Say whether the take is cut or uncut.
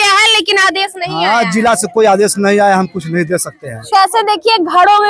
cut